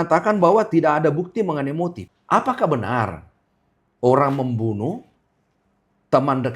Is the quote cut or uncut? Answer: cut